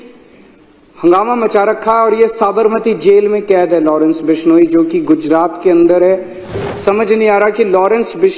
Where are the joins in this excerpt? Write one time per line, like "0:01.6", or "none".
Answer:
0:06.5